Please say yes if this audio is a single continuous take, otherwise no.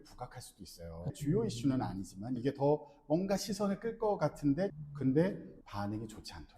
no